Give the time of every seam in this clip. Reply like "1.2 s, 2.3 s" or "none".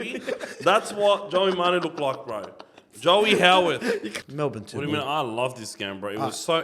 4.1 s